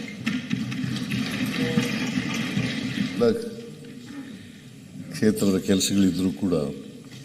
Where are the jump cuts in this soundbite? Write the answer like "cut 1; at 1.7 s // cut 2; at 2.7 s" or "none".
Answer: cut 1; at 3.2 s